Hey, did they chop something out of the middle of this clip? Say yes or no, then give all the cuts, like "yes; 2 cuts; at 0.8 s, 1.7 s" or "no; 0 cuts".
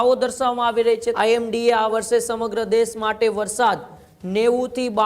yes; 1 cut; at 1.1 s